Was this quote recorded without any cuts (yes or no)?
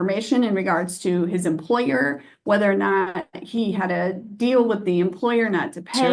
yes